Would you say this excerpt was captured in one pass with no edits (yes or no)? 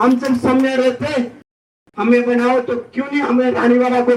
no